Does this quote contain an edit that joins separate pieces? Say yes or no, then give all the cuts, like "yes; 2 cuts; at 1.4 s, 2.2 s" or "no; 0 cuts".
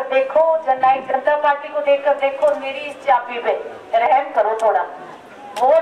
no; 0 cuts